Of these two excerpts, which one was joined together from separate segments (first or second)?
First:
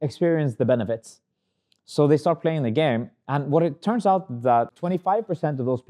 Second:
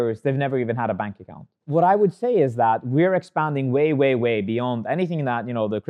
first